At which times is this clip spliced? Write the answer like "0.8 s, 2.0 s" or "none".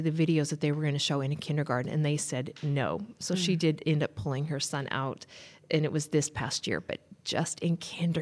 none

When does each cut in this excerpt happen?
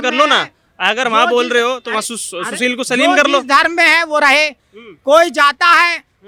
none

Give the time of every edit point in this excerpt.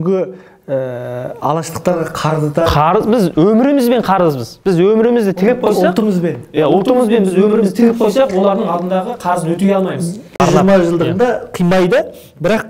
10.4 s

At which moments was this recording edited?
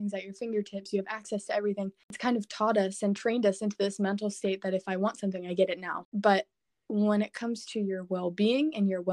2.0 s, 6.0 s

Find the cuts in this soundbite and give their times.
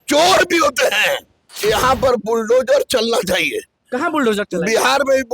1.5 s

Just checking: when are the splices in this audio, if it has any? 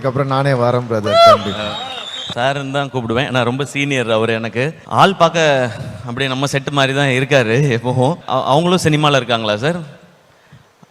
2.2 s, 4.8 s, 8.2 s

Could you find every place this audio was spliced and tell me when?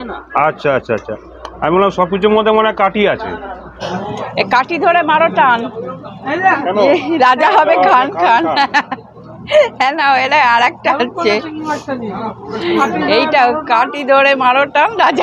3.8 s

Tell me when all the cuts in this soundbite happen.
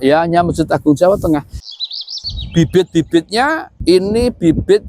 1.7 s, 3.7 s

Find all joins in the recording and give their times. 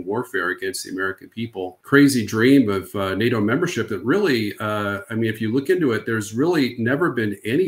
1.8 s

